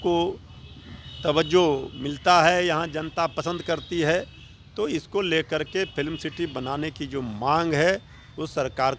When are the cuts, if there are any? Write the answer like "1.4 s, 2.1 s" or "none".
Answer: none